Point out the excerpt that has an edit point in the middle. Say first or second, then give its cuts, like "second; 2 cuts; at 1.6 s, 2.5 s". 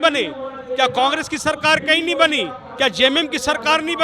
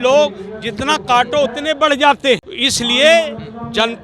second; 1 cut; at 2.6 s